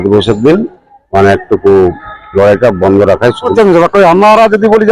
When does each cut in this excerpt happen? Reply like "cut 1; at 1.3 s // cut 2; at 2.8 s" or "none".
cut 1; at 3.5 s